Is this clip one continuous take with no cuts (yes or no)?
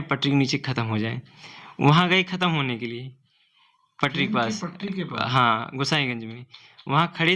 yes